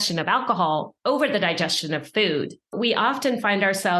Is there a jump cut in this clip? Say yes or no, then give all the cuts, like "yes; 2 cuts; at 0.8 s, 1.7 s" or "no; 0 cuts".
yes; 2 cuts; at 0.9 s, 2.7 s